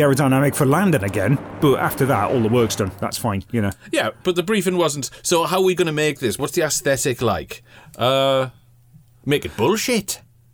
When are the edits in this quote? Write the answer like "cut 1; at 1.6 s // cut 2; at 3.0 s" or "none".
none